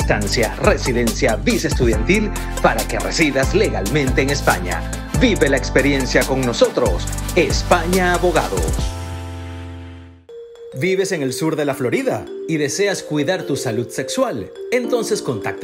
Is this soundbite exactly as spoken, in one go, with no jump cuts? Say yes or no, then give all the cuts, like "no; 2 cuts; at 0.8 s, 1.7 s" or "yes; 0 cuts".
no; 1 cut; at 10.1 s